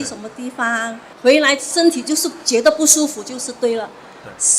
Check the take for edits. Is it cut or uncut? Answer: cut